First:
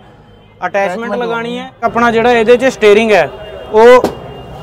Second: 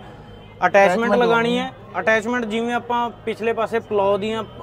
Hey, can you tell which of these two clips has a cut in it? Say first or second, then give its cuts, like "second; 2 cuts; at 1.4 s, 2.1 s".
first; 1 cut; at 1.8 s